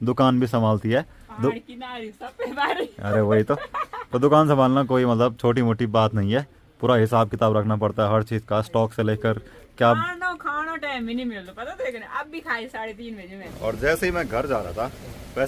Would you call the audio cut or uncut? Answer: cut